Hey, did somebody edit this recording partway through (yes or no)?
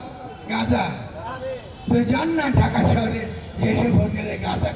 no